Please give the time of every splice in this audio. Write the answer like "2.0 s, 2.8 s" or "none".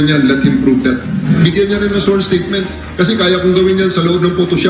1.4 s